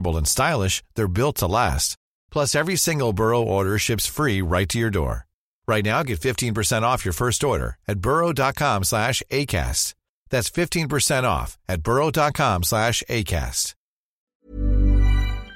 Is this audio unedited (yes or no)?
no